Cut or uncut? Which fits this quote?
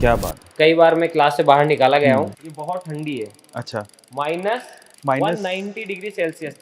cut